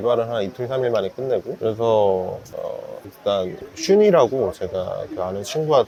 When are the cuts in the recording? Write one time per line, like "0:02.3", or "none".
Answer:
none